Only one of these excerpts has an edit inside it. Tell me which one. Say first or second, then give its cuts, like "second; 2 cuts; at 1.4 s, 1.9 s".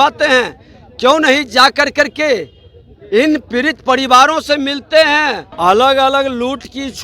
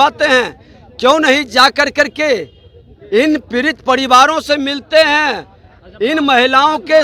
first; 1 cut; at 5.5 s